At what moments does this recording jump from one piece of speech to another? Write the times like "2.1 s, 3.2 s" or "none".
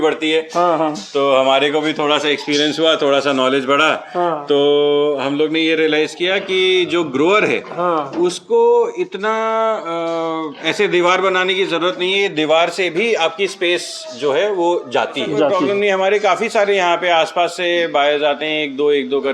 15.6 s